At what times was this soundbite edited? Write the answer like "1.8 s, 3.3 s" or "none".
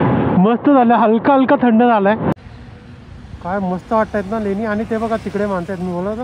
2.4 s